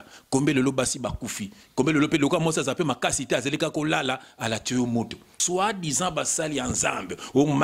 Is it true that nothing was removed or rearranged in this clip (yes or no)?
no